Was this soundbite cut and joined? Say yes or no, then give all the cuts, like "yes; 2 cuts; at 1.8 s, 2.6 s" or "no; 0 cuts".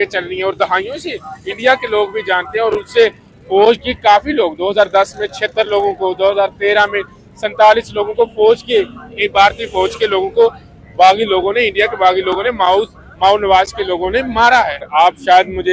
yes; 1 cut; at 14.8 s